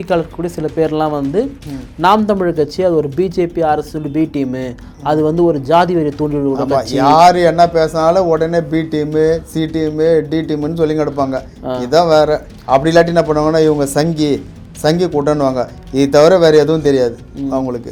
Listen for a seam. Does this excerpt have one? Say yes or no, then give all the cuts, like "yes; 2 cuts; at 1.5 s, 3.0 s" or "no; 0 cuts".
no; 0 cuts